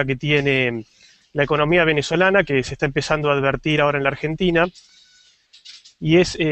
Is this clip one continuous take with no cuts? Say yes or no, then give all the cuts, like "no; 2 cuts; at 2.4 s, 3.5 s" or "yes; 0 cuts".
yes; 0 cuts